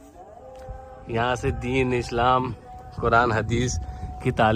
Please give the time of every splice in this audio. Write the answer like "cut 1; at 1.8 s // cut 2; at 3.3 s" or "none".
none